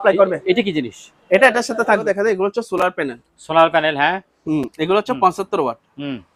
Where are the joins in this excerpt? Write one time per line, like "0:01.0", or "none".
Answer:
0:02.1